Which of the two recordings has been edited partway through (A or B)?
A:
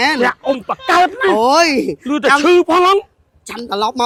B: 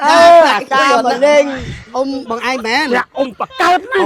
B